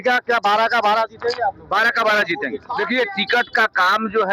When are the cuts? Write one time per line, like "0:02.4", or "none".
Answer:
0:02.7